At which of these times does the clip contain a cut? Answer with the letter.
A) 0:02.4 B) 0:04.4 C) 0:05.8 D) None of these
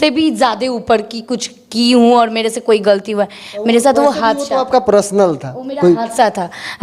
D